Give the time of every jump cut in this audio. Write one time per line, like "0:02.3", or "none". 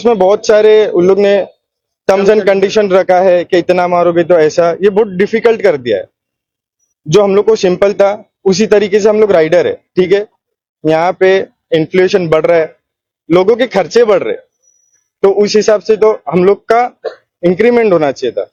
none